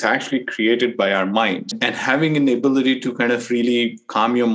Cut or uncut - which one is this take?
cut